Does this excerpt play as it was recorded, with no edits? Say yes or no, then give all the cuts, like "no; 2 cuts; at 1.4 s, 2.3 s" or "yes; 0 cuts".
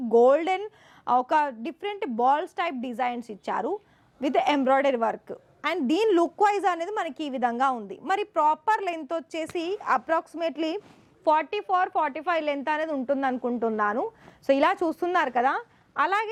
yes; 0 cuts